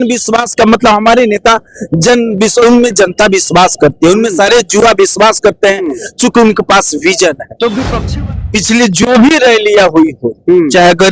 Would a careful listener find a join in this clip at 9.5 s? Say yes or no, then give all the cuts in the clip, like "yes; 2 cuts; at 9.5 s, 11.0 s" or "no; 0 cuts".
no; 1 cut; at 7.9 s